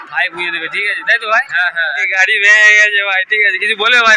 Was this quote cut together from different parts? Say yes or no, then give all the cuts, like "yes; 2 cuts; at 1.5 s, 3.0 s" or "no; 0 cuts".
yes; 1 cut; at 2.1 s